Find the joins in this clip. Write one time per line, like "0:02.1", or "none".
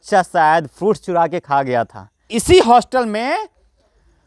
0:02.3